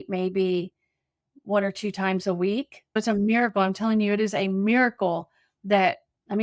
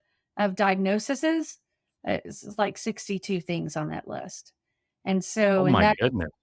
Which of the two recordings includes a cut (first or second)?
first